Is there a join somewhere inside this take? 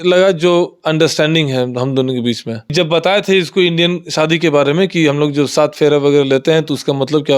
yes; 1 cut; at 2.7 s

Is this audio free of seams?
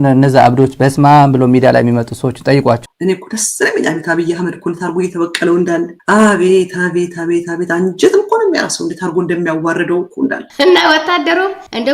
no; 2 cuts; at 2.8 s, 10.4 s

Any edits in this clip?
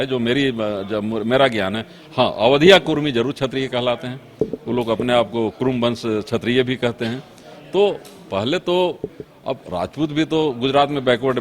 no; 0 cuts

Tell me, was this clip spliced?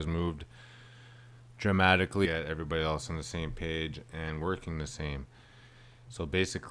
no; 0 cuts

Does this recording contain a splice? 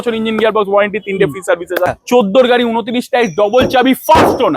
yes; 1 cut; at 1.9 s

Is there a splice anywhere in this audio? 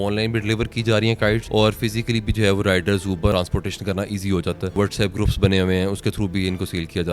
yes; 3 cuts; at 1.4 s, 3.3 s, 4.8 s

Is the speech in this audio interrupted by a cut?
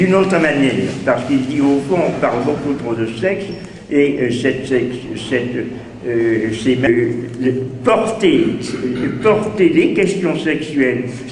no; 0 cuts

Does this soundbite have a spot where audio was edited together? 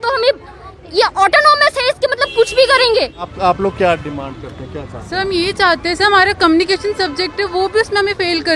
yes; 1 cut; at 3.3 s

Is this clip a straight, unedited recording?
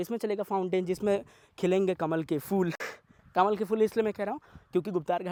yes; 0 cuts

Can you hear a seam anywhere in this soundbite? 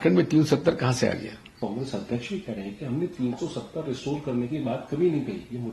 no; 0 cuts

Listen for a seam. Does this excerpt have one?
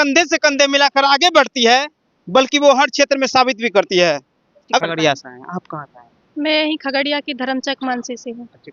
yes; 1 cut; at 4.8 s

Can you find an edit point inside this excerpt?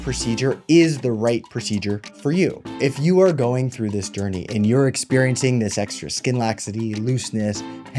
yes; 1 cut; at 2.7 s

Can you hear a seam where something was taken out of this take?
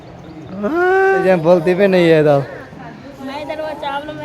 yes; 1 cut; at 1.2 s

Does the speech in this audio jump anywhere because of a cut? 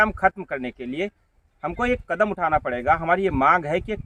no; 0 cuts

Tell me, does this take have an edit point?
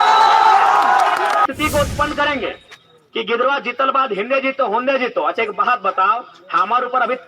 yes; 1 cut; at 1.4 s

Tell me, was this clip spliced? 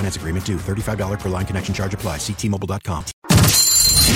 yes; 1 cut; at 3.1 s

